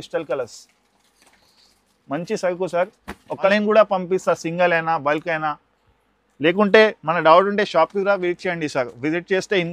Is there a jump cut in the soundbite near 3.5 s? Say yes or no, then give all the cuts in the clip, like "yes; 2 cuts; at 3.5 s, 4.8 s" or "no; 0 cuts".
yes; 1 cut; at 3.5 s